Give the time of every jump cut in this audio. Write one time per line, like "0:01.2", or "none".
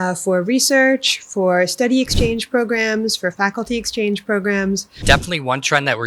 0:04.9